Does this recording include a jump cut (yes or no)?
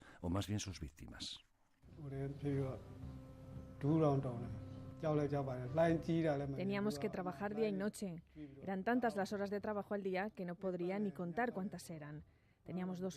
yes